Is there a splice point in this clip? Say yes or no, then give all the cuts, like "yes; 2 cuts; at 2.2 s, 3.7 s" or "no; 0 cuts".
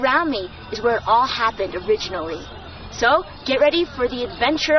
yes; 1 cut; at 3.4 s